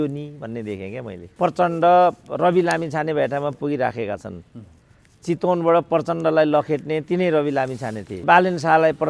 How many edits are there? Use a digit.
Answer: 2